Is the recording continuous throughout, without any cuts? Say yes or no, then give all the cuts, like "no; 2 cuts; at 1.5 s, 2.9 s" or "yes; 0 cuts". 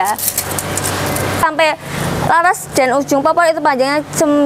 no; 1 cut; at 1.4 s